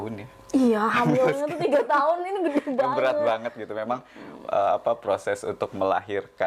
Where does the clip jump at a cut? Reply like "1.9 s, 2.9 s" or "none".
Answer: none